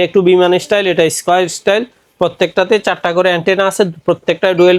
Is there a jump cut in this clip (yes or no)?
no